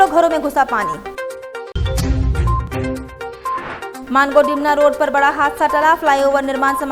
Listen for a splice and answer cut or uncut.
uncut